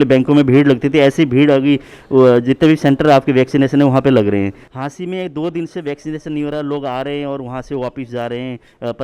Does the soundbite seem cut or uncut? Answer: cut